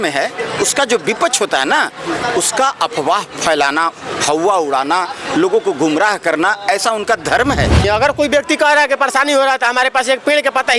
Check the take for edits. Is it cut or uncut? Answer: cut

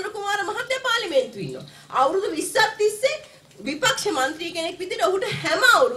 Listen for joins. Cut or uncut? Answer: uncut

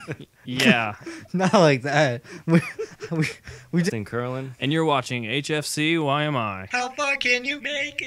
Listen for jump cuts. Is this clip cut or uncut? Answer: uncut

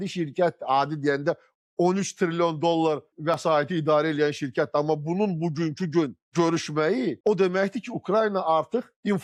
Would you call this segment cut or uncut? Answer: uncut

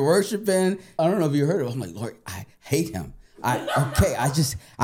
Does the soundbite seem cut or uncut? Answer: cut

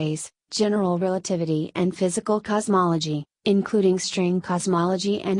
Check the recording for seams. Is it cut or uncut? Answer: uncut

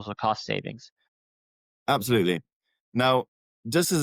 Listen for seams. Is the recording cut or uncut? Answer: cut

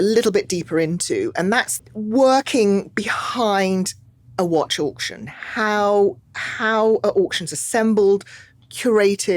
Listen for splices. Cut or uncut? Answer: cut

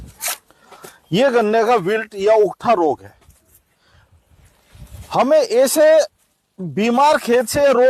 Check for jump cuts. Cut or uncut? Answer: uncut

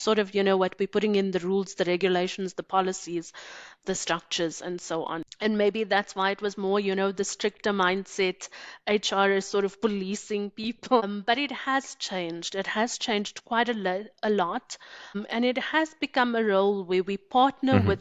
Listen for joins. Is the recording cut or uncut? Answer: uncut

